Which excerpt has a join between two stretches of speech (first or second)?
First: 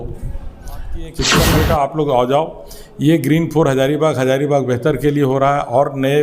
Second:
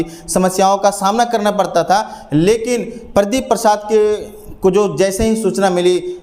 first